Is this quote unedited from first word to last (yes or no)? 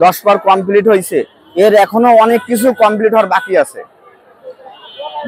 yes